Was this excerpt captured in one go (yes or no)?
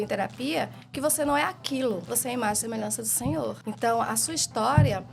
no